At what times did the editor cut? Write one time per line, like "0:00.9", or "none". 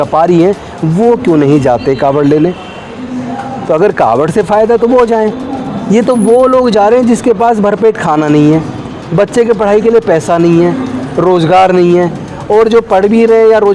none